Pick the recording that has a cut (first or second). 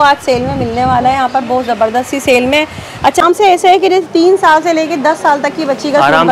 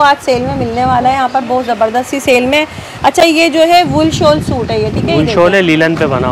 first